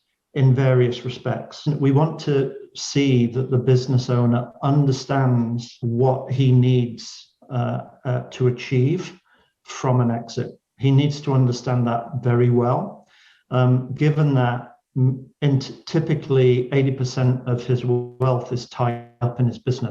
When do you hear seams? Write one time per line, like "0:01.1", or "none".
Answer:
0:01.6
0:05.8